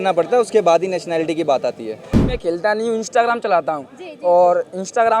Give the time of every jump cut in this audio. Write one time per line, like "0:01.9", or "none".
0:02.2